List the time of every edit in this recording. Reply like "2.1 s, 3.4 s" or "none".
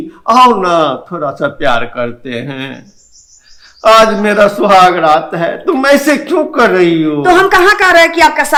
none